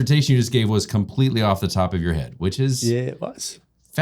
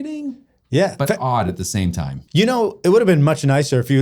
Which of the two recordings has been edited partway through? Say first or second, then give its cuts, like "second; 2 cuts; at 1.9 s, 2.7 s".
second; 1 cut; at 2.1 s